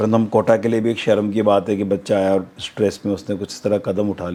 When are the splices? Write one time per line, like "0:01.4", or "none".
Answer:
none